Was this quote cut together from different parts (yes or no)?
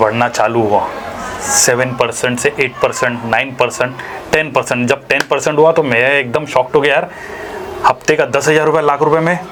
no